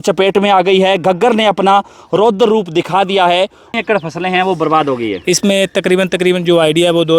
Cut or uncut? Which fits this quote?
cut